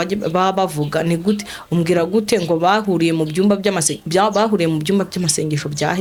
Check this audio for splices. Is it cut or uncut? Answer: uncut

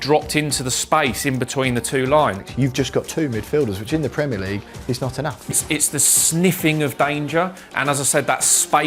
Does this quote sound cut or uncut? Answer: cut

